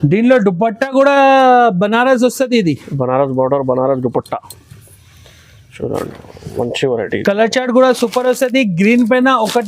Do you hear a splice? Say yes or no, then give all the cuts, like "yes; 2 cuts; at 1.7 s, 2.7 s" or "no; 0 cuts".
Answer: no; 0 cuts